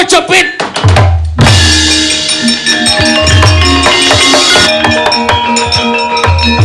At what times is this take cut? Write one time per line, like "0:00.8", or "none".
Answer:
0:04.7